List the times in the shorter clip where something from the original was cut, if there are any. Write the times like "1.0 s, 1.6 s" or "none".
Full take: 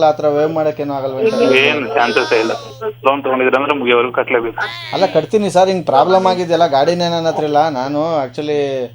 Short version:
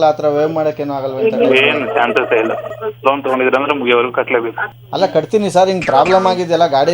none